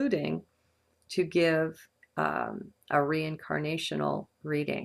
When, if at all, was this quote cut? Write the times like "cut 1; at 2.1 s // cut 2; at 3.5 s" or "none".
cut 1; at 1.6 s